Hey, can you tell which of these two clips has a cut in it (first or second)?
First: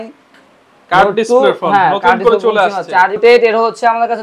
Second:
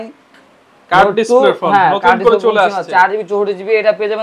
first